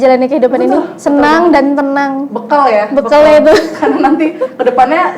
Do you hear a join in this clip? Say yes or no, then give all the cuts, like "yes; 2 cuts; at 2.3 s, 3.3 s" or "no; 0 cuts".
no; 0 cuts